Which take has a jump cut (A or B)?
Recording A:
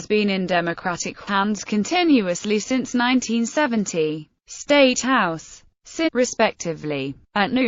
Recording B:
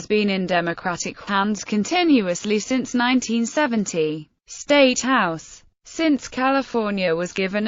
B